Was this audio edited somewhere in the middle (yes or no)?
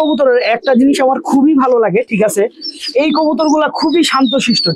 no